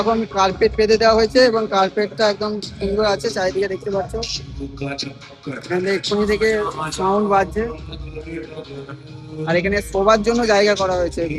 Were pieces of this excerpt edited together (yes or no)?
no